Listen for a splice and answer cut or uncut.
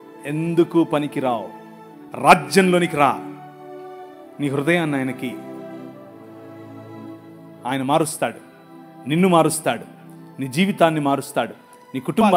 uncut